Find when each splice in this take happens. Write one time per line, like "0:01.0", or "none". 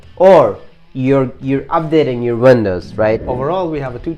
0:03.3